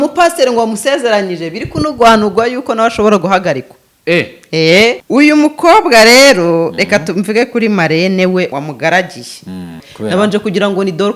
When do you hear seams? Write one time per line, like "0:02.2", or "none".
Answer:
0:05.0
0:08.5
0:09.9